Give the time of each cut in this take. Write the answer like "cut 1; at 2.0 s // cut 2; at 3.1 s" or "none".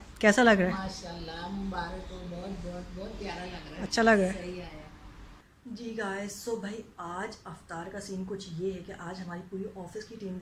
none